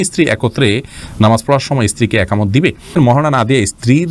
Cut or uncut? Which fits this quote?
cut